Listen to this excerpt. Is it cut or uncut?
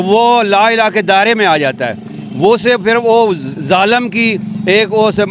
uncut